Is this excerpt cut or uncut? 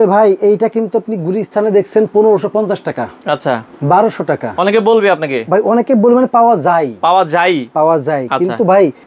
uncut